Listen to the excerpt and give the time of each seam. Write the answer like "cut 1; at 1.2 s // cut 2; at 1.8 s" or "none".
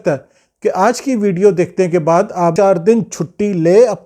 cut 1; at 2.5 s